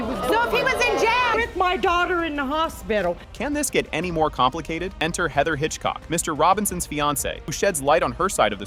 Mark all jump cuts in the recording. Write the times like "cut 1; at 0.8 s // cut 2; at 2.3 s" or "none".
none